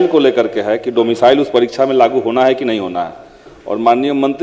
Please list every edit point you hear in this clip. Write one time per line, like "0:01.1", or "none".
none